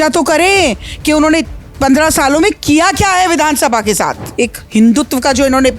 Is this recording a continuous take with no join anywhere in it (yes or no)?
no